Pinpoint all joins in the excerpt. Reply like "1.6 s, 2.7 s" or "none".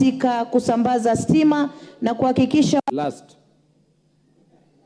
2.8 s